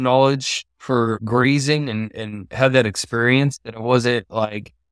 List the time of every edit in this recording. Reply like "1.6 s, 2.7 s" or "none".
1.2 s